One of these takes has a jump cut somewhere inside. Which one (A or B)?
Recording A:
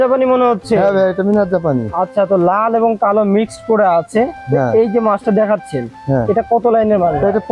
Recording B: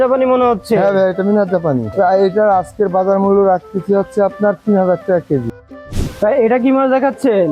B